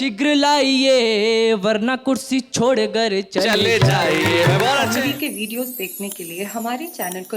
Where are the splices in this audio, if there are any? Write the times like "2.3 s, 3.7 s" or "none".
4.9 s